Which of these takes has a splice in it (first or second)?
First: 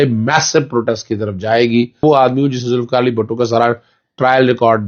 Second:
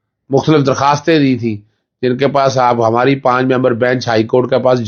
first